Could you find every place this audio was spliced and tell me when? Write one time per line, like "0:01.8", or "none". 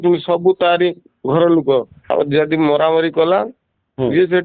0:02.0